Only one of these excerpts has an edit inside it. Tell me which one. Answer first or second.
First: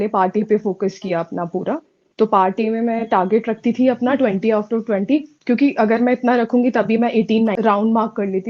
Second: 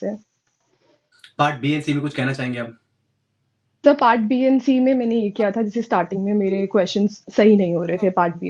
first